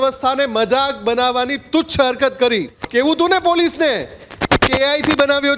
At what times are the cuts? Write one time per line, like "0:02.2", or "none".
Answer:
0:02.8